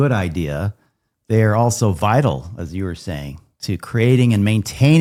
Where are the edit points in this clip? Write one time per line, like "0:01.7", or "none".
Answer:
none